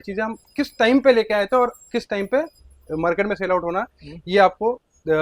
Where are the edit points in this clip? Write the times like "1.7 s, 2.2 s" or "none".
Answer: none